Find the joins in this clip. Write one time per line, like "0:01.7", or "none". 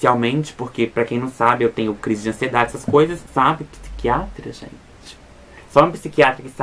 0:03.2